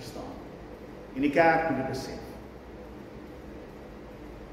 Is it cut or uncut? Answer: uncut